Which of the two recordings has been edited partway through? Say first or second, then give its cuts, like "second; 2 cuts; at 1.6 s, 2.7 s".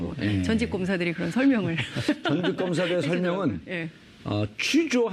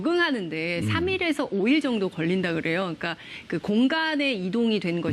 second; 1 cut; at 1.8 s